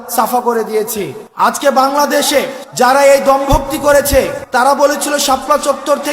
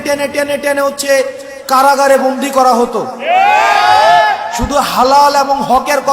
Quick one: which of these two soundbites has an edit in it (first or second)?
first